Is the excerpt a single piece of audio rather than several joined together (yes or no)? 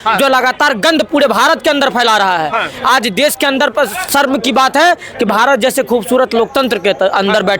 yes